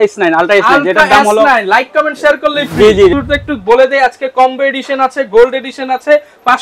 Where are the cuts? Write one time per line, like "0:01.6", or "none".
0:03.1